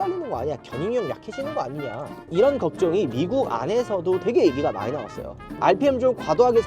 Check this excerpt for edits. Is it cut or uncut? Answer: cut